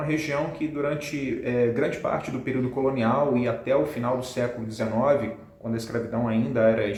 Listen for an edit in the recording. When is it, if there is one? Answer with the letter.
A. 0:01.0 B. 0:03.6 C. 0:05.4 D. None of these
D